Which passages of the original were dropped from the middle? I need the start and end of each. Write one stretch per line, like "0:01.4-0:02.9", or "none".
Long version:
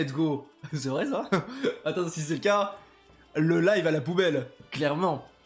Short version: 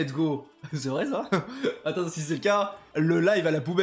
0:02.8-0:03.2

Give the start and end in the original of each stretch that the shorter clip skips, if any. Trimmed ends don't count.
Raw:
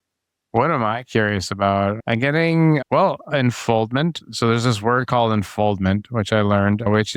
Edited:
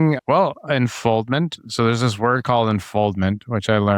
none

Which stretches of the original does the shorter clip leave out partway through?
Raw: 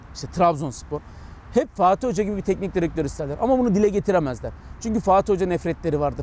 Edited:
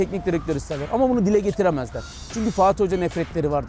none

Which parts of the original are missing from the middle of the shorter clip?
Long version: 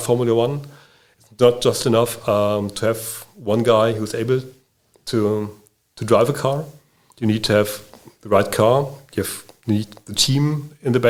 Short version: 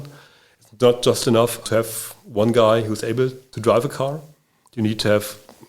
0:02.2-0:02.7
0:04.6-0:05.9

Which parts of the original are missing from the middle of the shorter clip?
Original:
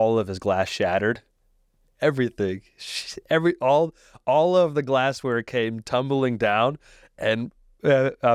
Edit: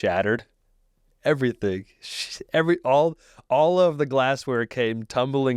none

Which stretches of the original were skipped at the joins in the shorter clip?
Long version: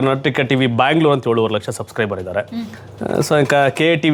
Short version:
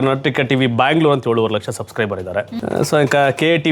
0:02.6-0:02.9

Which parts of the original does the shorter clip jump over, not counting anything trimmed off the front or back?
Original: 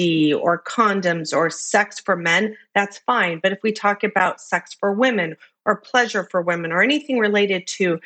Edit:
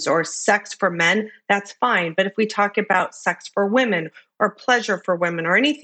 none

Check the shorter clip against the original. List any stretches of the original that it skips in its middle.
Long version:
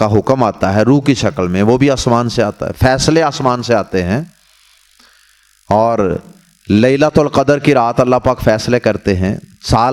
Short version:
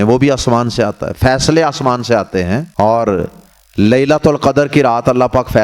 0:04.3-0:05.6

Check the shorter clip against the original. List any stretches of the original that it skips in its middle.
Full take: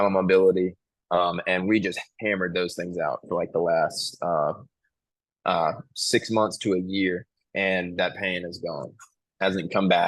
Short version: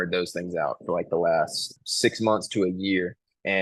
0:04.1-0:05.8

